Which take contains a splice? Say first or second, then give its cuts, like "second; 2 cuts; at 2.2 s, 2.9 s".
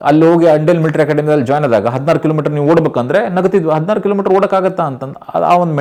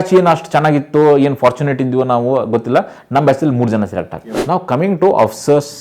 second; 1 cut; at 4.2 s